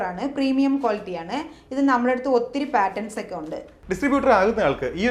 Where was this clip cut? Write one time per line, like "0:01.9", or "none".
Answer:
0:03.8

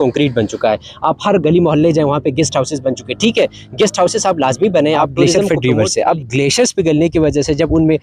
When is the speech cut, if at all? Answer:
0:05.4

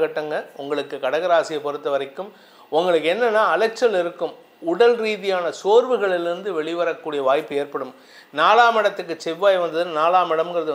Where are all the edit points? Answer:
none

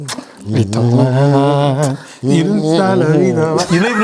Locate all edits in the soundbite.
none

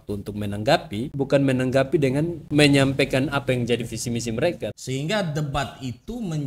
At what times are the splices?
0:01.1
0:02.4
0:04.7

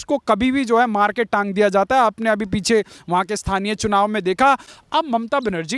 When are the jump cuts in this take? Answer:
0:04.7

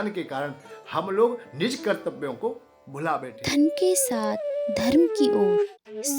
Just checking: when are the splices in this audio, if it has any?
0:03.0

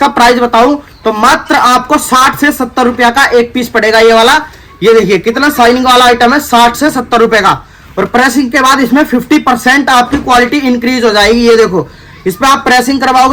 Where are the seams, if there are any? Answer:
none

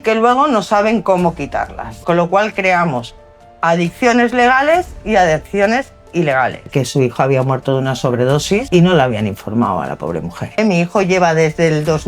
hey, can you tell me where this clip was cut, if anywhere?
0:01.9
0:06.7
0:08.7
0:10.6

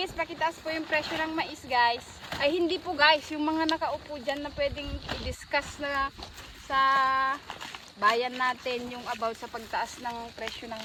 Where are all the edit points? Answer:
none

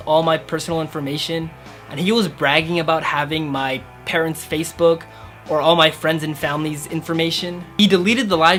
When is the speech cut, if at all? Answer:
none

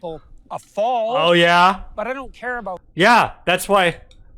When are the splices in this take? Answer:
none

